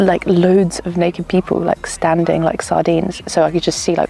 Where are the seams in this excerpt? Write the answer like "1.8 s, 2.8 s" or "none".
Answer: 3.2 s

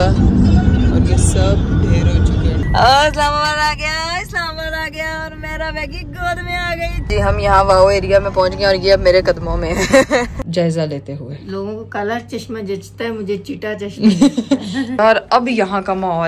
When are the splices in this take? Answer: 2.6 s, 7.0 s, 10.4 s, 14.9 s

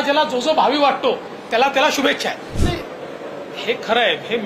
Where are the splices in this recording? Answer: 2.5 s

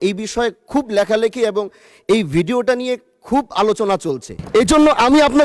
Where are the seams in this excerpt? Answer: 4.3 s

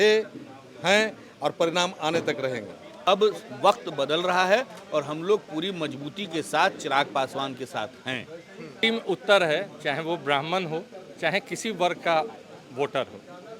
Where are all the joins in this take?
3.0 s, 8.8 s

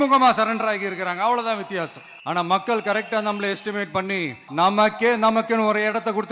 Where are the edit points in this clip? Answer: 2.1 s, 4.4 s

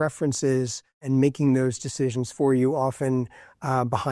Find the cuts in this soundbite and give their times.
1.0 s

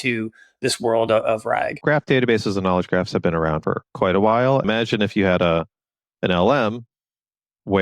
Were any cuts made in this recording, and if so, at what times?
1.8 s, 3.6 s, 4.6 s

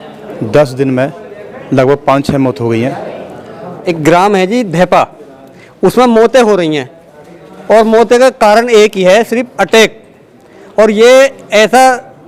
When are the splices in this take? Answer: 3.8 s

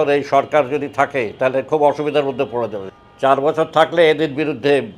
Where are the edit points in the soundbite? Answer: 2.8 s

